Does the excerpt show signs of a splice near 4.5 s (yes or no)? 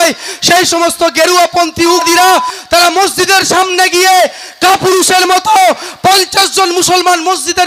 no